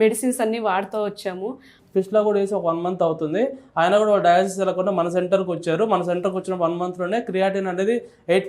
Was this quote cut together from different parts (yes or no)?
yes